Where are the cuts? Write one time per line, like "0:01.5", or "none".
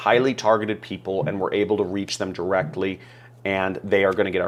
none